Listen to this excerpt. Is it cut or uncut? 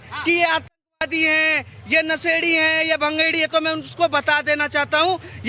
uncut